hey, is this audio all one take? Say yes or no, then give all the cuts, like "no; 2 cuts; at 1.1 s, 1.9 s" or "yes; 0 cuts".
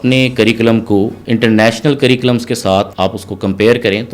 no; 2 cuts; at 1.2 s, 2.9 s